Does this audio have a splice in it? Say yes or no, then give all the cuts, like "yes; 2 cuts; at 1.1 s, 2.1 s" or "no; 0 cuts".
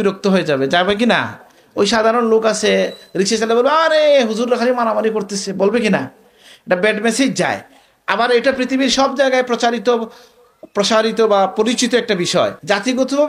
no; 0 cuts